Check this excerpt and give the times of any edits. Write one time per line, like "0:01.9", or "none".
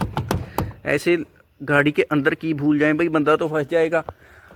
none